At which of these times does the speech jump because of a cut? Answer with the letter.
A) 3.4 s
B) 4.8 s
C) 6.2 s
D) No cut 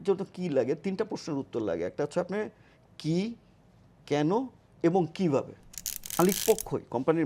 C